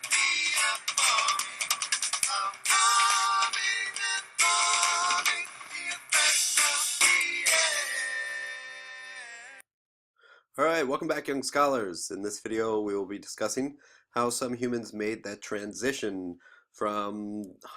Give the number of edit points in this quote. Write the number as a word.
one